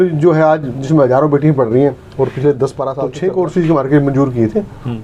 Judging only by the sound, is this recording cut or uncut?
cut